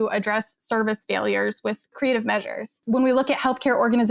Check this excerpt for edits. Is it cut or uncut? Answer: cut